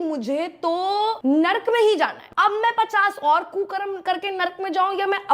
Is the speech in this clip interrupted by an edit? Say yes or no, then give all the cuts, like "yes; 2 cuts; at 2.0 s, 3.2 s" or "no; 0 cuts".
yes; 2 cuts; at 1.2 s, 2.2 s